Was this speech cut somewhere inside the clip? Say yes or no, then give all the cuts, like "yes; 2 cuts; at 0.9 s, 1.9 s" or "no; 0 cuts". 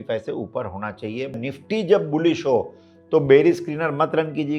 yes; 1 cut; at 1.4 s